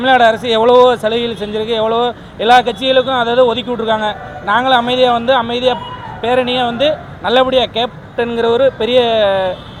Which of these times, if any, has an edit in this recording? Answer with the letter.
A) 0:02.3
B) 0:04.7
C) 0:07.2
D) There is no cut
D